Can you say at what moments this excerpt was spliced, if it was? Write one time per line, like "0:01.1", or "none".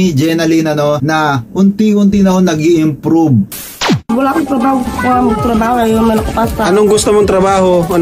0:01.0
0:03.9